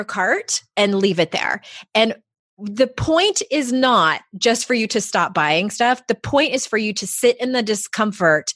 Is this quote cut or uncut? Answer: uncut